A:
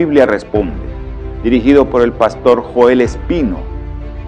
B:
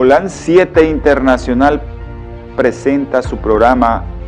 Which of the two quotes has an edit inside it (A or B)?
B